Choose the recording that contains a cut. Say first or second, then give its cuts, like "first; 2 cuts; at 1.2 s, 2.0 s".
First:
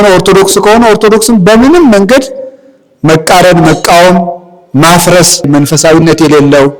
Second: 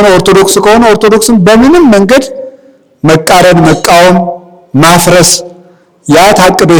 first; 1 cut; at 5.5 s